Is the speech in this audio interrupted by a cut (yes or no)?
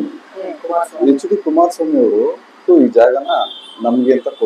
yes